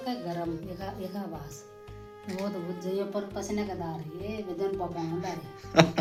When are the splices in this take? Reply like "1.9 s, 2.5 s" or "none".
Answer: none